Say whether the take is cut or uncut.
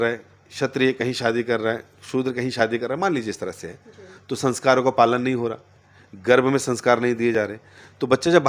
uncut